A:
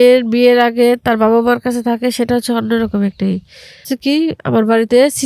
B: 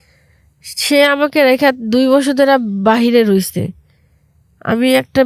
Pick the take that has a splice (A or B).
A